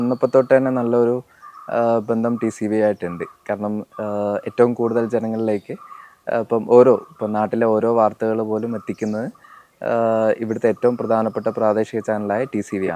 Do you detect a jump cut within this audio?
no; 0 cuts

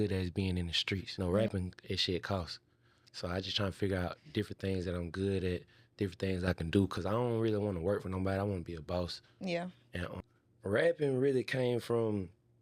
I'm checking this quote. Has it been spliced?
yes; 2 cuts; at 1.1 s, 10.1 s

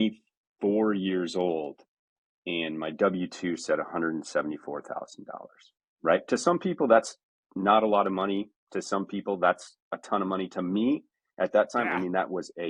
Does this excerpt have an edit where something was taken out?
no; 0 cuts

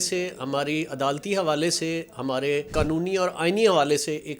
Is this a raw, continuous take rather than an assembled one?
no; 1 cut; at 2.7 s

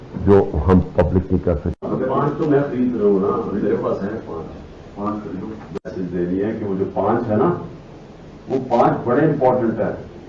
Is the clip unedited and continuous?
no; 1 cut; at 1.7 s

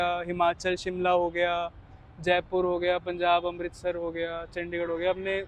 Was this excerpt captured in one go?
yes; 0 cuts

